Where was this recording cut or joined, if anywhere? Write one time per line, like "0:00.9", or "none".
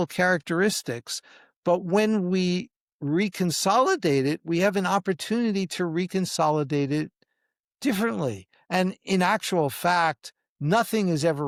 none